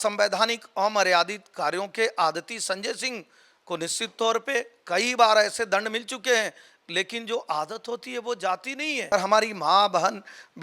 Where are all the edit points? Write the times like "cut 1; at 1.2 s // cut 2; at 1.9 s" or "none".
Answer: cut 1; at 9.1 s